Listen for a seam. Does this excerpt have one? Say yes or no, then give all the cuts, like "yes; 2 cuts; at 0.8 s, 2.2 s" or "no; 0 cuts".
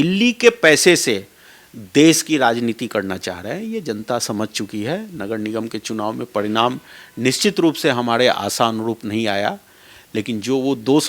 no; 0 cuts